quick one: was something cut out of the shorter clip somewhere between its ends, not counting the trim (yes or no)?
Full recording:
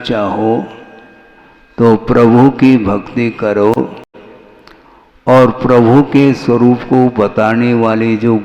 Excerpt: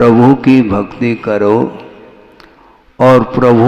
yes